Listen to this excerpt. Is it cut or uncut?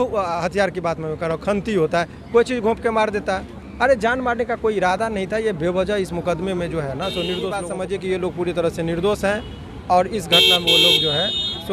cut